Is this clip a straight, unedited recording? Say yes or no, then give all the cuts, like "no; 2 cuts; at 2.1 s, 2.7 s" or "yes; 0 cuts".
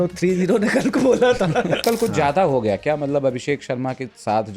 no; 1 cut; at 1.8 s